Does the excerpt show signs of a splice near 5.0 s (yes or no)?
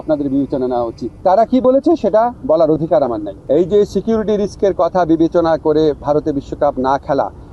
no